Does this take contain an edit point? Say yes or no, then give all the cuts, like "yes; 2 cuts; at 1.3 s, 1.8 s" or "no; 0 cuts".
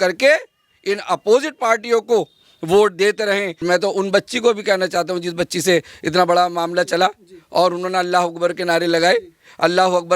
yes; 1 cut; at 3.6 s